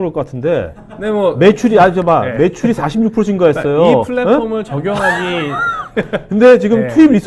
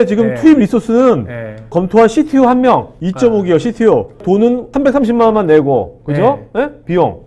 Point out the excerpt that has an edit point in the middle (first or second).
second